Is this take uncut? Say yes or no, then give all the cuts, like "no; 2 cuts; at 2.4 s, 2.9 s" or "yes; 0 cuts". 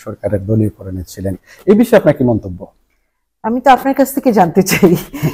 yes; 0 cuts